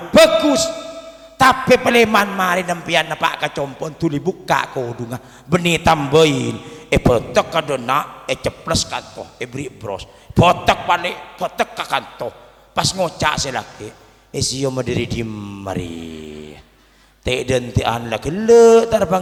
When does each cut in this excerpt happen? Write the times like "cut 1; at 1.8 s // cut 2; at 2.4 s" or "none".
none